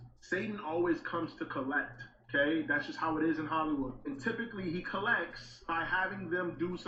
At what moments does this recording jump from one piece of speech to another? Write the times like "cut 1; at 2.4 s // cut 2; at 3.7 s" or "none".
none

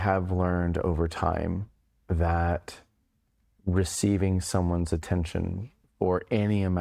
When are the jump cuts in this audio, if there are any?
none

